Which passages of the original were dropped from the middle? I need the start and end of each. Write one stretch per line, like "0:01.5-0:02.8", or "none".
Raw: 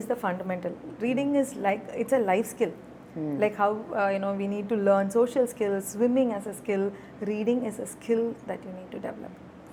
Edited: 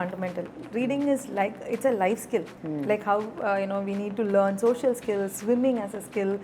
0:02.8-0:03.1